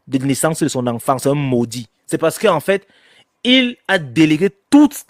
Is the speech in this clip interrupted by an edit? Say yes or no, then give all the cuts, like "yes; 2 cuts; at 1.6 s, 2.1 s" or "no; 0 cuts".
no; 0 cuts